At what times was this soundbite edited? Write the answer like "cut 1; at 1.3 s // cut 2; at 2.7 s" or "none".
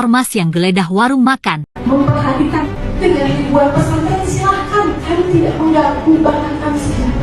cut 1; at 1.7 s // cut 2; at 2.8 s